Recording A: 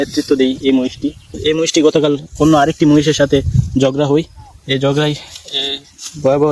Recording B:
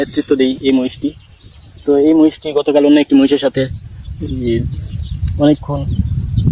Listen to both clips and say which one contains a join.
A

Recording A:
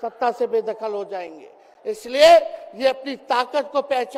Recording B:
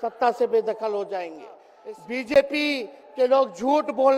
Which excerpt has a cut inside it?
B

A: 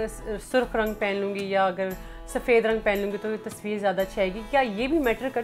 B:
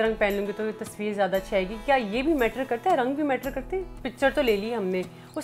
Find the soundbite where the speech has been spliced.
B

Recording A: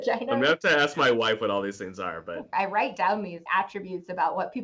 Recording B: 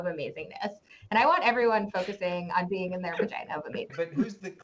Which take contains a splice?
A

